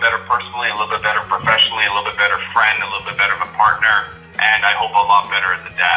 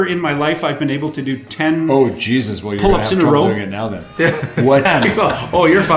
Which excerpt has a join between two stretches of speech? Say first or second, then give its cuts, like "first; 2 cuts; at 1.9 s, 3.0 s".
second; 1 cut; at 4.8 s